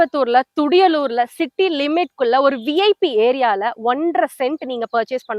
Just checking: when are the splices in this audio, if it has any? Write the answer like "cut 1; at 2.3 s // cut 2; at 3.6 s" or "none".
none